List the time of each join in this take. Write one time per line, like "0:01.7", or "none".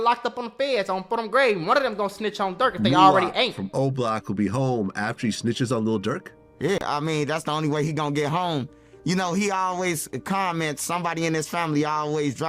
none